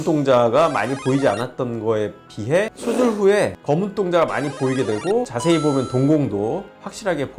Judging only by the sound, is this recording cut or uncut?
uncut